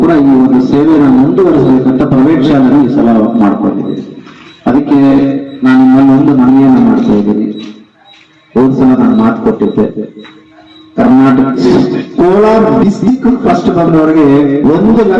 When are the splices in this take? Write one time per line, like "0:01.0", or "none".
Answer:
0:11.6